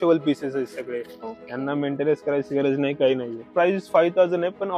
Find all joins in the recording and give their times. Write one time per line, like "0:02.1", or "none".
0:03.5